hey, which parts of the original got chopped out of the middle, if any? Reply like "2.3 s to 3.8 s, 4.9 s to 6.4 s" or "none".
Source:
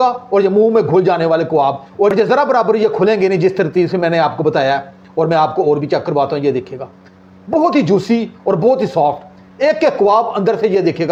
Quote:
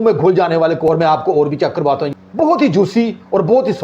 1.5 s to 5.1 s, 6.4 s to 7.2 s